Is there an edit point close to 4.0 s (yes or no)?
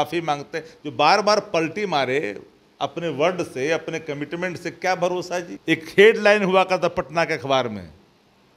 no